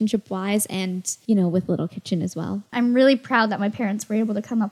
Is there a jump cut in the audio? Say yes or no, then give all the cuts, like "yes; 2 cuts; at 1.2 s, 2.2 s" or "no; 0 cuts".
yes; 2 cuts; at 1.1 s, 2.7 s